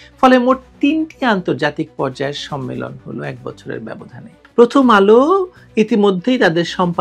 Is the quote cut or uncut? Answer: cut